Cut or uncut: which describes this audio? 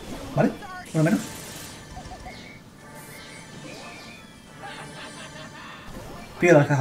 uncut